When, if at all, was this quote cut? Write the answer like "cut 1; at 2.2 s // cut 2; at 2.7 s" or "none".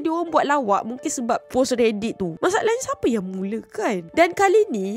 cut 1; at 2.3 s